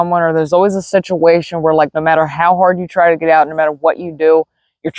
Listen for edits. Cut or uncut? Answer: uncut